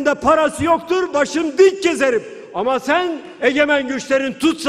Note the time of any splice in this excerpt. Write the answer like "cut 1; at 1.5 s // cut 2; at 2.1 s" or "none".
none